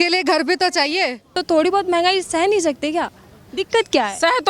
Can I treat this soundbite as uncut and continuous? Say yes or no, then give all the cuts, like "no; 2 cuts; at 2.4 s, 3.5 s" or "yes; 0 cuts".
no; 1 cut; at 1.3 s